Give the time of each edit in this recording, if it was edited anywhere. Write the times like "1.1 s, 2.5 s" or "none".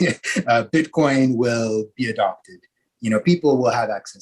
none